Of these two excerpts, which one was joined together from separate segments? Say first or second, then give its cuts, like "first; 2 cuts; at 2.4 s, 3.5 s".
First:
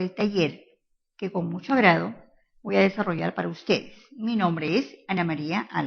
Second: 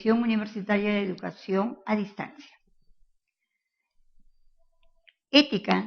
first; 1 cut; at 4.0 s